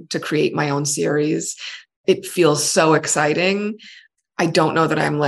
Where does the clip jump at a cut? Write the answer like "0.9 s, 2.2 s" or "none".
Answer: 2.0 s, 4.0 s